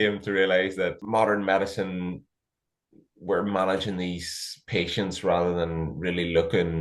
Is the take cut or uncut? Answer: cut